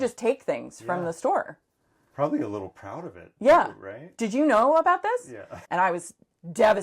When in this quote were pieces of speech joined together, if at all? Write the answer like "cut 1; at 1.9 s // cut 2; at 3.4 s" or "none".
cut 1; at 5.5 s